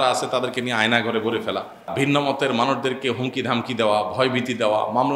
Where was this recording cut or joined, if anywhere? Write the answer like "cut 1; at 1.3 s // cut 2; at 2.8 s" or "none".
cut 1; at 1.9 s